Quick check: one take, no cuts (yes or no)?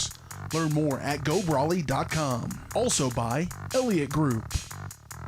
no